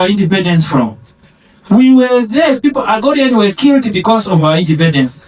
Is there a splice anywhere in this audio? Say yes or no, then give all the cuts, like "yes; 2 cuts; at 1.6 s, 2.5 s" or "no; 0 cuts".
no; 0 cuts